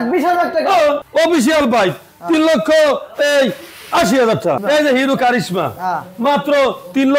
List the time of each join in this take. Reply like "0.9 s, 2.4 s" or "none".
1.0 s, 4.6 s